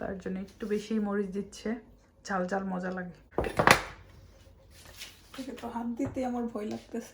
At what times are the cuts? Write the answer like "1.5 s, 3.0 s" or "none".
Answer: 3.2 s

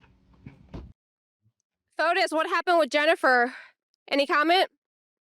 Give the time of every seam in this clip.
1.0 s

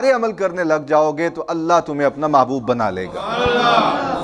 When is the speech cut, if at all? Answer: none

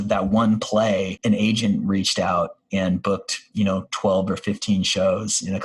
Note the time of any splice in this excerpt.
1.1 s

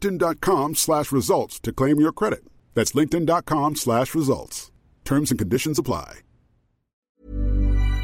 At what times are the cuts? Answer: 7.1 s

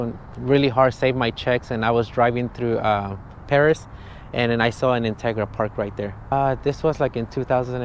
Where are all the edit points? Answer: 6.3 s

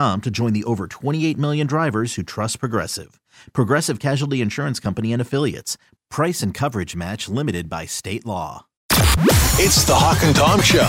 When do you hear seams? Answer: 8.7 s

